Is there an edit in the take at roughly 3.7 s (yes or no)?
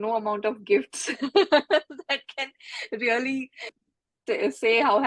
yes